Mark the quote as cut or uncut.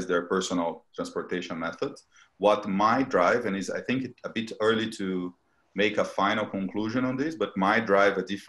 uncut